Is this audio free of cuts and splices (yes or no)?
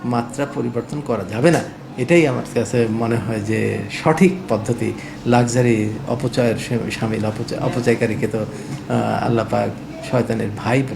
yes